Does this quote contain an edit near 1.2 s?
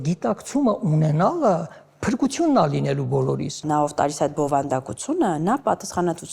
no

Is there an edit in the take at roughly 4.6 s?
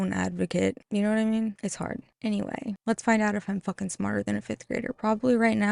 no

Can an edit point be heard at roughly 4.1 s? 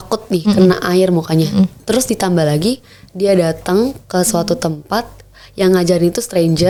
no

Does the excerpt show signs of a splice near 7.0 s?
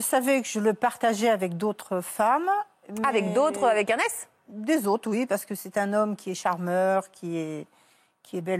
no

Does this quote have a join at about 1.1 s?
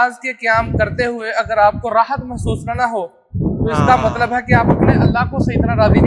no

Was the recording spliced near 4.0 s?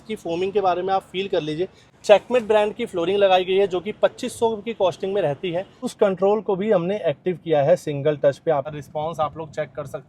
no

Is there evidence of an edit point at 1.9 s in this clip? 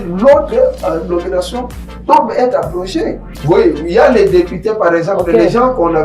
no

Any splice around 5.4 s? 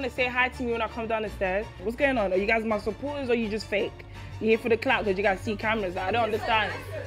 no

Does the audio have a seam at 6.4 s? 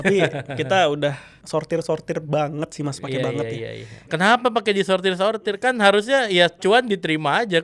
no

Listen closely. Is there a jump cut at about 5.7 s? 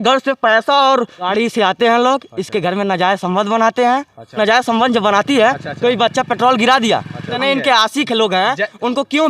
no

